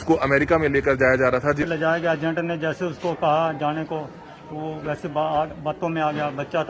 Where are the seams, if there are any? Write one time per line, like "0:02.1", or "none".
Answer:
0:01.6